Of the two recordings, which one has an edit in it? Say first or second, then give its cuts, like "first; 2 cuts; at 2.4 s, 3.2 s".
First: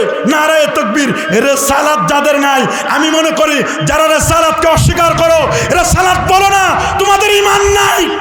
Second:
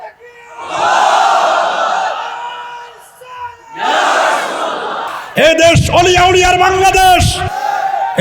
second; 1 cut; at 5.2 s